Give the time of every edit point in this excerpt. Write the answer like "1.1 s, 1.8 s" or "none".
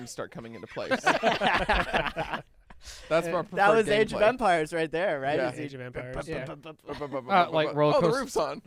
none